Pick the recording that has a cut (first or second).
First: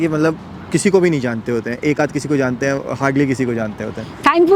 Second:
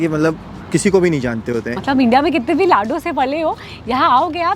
second